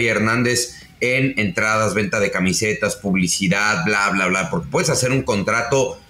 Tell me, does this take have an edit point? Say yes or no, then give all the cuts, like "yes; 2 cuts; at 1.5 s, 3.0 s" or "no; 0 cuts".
no; 0 cuts